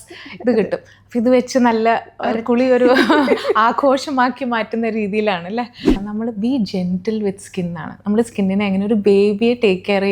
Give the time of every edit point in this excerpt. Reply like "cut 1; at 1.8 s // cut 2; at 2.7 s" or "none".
cut 1; at 5.9 s

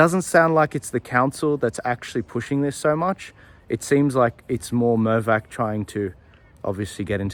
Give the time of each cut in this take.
none

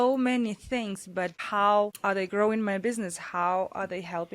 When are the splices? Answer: cut 1; at 1.5 s

